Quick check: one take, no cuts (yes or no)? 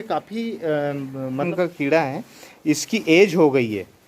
no